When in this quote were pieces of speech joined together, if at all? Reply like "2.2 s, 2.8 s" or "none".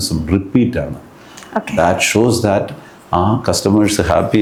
none